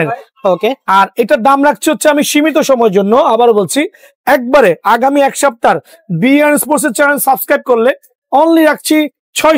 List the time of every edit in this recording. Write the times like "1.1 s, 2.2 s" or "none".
none